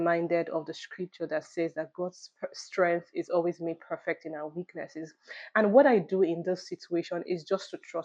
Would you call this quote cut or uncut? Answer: uncut